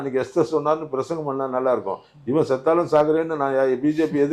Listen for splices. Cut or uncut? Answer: uncut